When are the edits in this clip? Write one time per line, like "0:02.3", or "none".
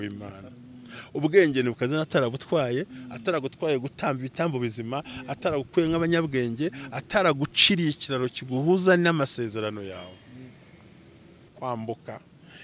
0:11.5